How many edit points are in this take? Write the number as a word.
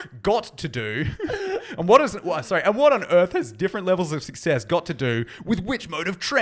zero